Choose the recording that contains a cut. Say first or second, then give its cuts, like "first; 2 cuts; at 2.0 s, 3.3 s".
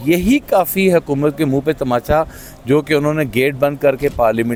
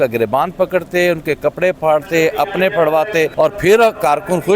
second; 1 cut; at 3.3 s